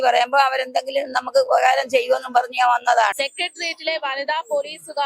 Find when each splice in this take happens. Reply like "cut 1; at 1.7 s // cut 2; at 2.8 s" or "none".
cut 1; at 3.2 s